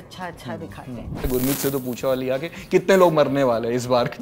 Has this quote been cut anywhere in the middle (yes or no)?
yes